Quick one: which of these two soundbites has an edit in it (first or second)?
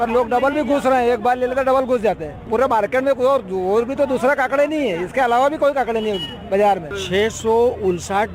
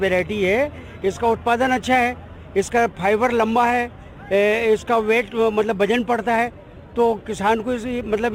first